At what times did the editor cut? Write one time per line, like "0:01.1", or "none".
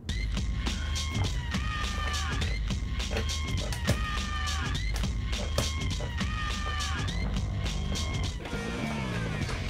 none